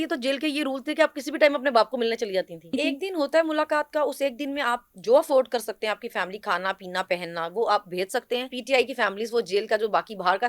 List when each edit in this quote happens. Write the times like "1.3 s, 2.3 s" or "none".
2.7 s, 8.6 s